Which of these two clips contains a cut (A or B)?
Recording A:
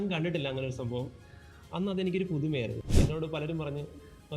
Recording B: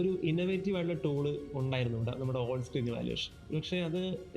A